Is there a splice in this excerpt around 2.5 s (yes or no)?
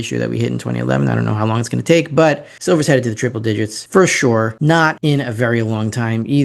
yes